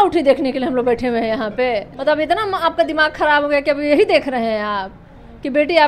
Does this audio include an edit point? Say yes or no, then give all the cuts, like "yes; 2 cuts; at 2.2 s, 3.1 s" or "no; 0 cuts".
yes; 1 cut; at 1.9 s